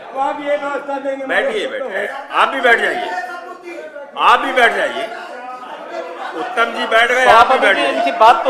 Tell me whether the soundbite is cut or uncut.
cut